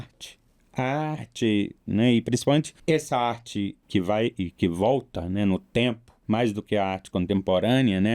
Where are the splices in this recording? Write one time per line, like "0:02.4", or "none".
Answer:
0:02.7
0:03.8
0:06.1